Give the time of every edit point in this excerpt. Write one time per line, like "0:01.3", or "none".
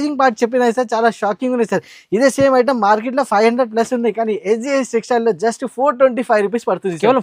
none